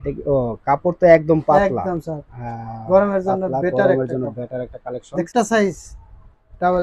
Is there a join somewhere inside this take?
yes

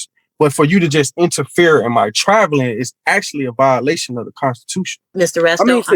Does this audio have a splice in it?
yes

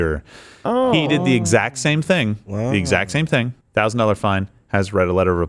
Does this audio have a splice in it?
yes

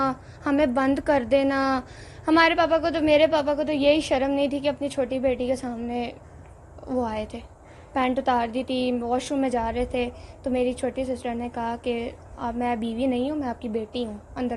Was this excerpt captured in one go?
yes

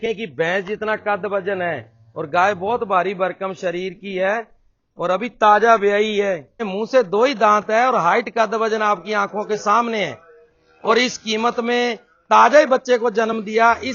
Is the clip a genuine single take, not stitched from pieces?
no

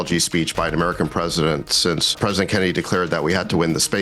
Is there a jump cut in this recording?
yes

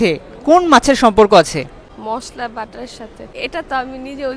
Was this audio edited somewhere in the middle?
yes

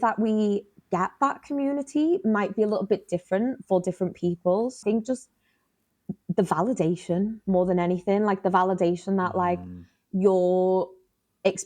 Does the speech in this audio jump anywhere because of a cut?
yes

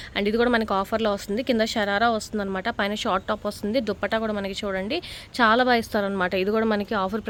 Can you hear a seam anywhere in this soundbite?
no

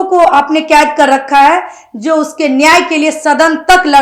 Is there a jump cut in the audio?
no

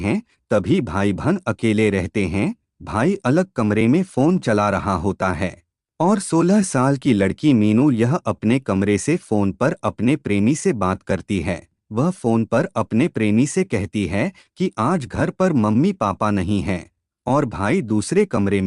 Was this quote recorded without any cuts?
no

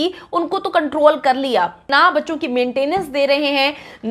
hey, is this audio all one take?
no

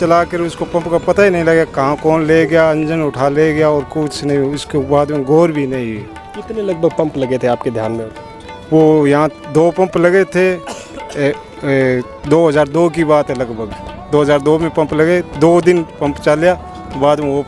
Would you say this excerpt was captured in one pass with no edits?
yes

